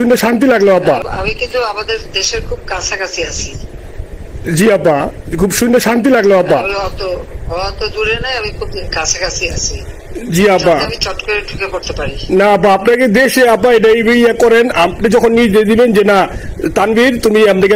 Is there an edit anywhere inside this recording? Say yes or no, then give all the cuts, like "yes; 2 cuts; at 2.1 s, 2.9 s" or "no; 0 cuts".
yes; 1 cut; at 1.0 s